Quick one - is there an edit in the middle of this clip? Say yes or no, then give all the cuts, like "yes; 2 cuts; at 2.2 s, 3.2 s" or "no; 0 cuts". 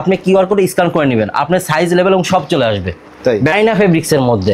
yes; 1 cut; at 3.5 s